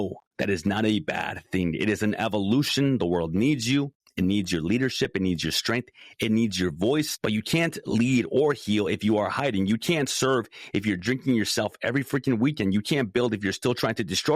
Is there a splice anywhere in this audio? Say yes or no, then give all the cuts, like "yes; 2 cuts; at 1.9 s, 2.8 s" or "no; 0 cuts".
yes; 2 cuts; at 4.0 s, 7.1 s